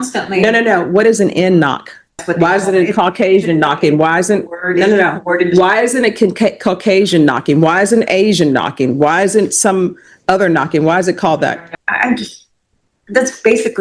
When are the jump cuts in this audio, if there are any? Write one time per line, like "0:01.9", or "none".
0:02.2
0:11.7